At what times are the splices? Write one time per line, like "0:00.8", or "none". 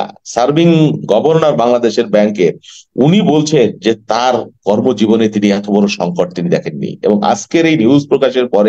none